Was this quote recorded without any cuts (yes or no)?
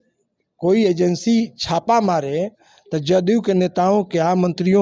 yes